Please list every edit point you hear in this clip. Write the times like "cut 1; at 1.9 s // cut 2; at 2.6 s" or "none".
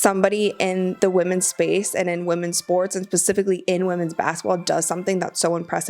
cut 1; at 0.9 s